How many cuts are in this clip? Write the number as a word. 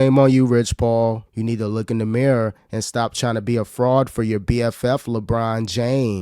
one